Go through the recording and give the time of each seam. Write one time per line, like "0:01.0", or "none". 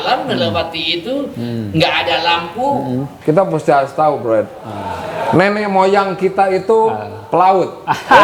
0:03.1